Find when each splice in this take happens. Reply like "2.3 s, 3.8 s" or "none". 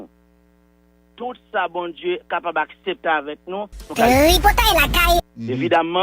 4.0 s, 5.3 s